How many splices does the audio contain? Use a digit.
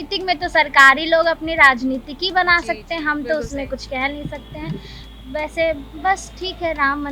0